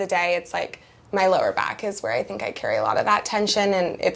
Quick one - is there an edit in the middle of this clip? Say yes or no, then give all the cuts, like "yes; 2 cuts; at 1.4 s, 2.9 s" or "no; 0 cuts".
no; 0 cuts